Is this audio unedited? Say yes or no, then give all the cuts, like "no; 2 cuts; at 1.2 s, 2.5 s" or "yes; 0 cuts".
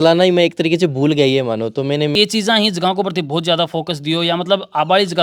no; 1 cut; at 2.1 s